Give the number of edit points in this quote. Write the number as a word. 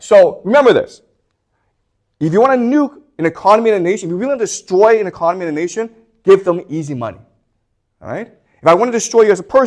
zero